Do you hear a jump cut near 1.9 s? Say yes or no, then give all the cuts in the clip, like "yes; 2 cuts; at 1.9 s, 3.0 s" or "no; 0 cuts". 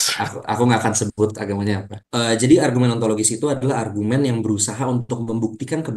yes; 1 cut; at 1.9 s